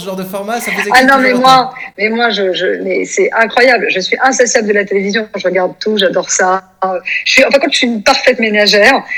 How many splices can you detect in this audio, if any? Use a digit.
0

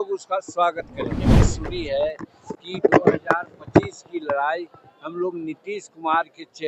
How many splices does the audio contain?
1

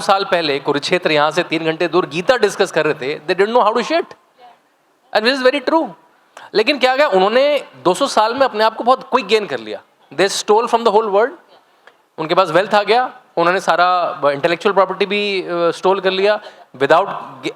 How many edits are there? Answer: 0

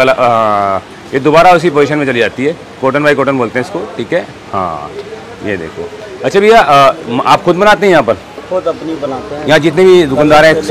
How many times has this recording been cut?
0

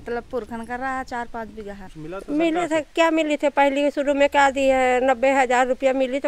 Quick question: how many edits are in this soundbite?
1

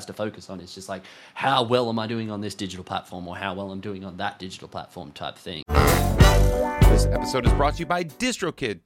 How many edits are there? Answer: 1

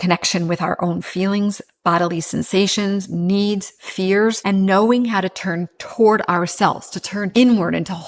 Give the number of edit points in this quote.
2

